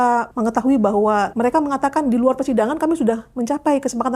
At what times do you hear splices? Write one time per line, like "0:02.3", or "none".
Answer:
0:01.3